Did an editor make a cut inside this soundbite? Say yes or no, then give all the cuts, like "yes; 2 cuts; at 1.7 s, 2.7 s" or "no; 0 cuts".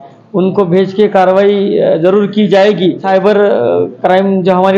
yes; 1 cut; at 3.0 s